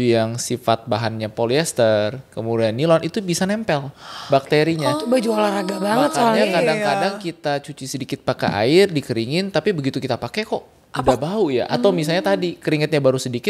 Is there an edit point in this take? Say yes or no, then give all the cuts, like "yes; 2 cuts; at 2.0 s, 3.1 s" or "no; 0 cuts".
no; 0 cuts